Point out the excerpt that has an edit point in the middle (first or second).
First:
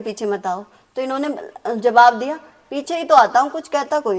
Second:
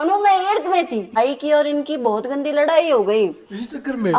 second